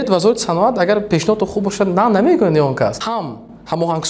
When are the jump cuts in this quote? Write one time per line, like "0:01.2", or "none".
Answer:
0:03.0